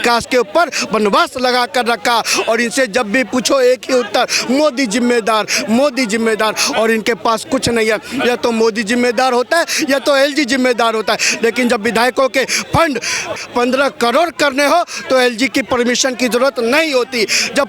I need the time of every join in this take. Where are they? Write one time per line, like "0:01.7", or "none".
none